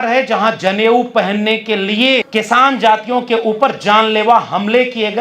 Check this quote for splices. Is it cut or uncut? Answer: cut